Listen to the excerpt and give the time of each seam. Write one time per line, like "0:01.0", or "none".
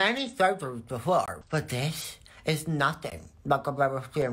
0:01.4